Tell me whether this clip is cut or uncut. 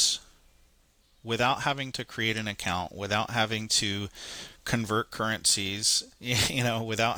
uncut